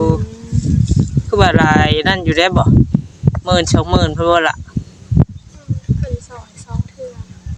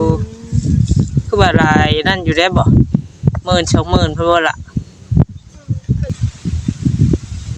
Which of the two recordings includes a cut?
second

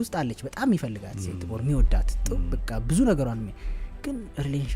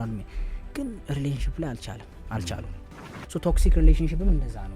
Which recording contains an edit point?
second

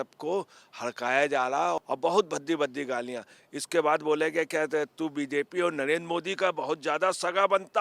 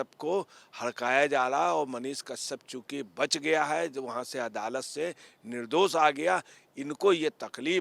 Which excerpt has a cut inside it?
first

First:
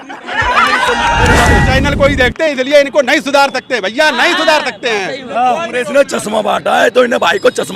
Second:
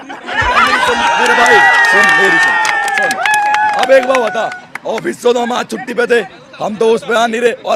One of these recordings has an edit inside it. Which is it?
first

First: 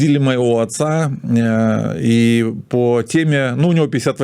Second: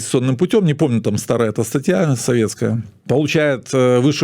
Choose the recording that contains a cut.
second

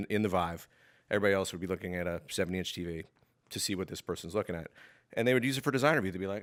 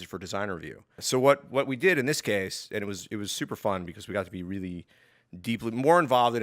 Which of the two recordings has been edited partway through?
second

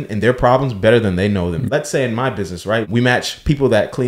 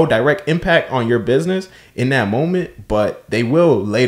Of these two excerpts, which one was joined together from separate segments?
first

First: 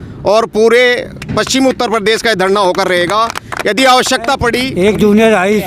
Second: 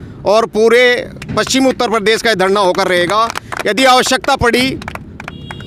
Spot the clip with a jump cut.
first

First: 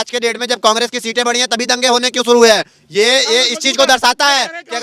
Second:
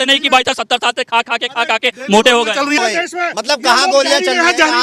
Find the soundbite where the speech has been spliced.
second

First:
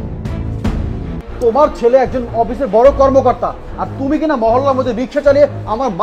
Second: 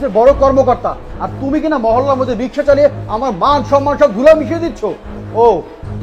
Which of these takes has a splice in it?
first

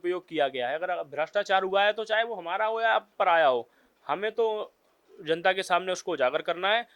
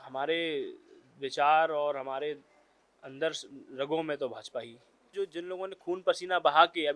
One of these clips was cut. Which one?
second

